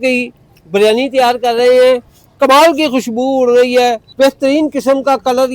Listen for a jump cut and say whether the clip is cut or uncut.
cut